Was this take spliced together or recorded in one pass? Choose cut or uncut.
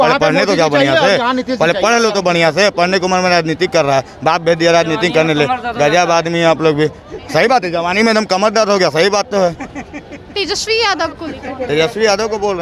uncut